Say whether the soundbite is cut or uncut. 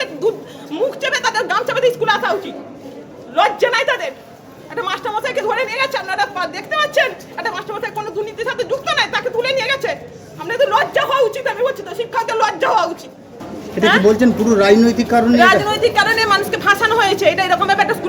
cut